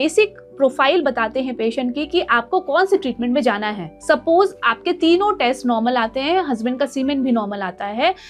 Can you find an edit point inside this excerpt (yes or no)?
no